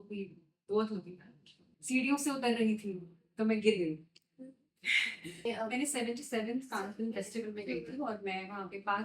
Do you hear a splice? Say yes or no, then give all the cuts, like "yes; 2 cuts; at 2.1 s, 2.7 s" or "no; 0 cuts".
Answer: yes; 2 cuts; at 1.5 s, 5.5 s